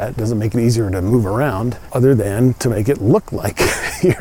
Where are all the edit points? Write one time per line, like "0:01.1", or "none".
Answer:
0:01.8